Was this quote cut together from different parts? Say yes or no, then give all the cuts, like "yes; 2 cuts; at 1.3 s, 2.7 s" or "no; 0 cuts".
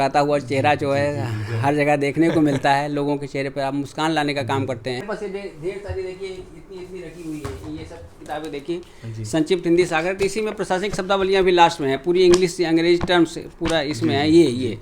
yes; 1 cut; at 5.0 s